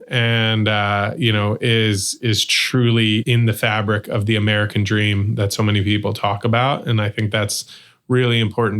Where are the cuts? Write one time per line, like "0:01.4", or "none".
0:03.2